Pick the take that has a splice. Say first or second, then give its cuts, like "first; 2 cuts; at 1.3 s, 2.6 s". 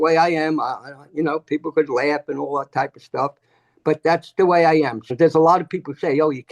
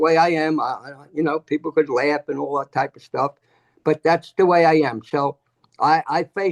first; 1 cut; at 5.0 s